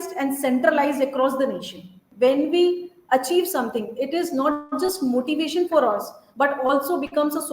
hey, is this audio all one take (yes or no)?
no